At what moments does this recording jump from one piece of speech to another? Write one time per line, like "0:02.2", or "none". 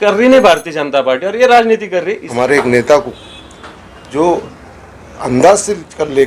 0:02.2